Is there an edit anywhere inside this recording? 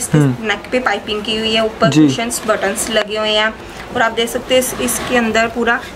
no; 0 cuts

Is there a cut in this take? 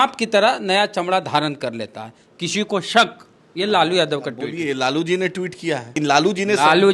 yes; 1 cut; at 6.0 s

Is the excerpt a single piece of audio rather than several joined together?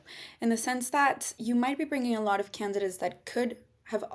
no; 1 cut; at 1.3 s

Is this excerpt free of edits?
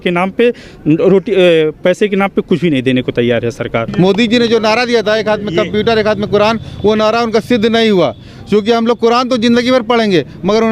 no; 1 cut; at 3.8 s

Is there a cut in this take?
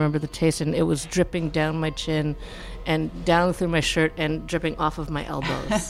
yes; 1 cut; at 1.3 s

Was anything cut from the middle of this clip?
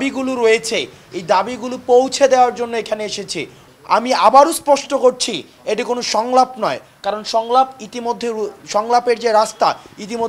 yes; 1 cut; at 3.6 s

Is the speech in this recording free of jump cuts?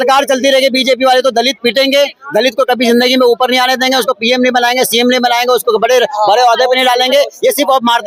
yes; 0 cuts

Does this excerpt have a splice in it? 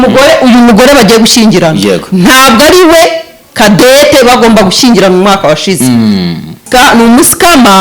yes; 1 cut; at 6.6 s

